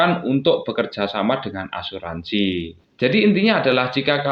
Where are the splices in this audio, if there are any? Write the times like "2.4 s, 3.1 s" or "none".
2.8 s